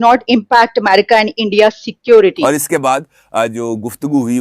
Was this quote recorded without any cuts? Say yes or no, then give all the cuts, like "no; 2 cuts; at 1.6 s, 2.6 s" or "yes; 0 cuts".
no; 1 cut; at 2.4 s